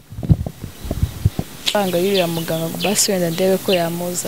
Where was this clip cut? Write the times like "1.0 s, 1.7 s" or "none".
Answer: 1.7 s